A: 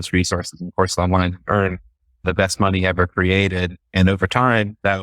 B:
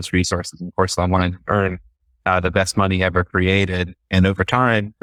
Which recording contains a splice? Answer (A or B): A